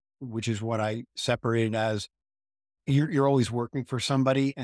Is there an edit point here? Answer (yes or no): no